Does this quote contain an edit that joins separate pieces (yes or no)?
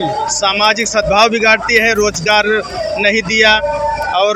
no